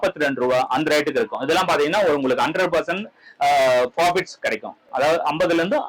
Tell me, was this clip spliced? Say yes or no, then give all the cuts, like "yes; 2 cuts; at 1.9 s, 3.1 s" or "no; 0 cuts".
no; 0 cuts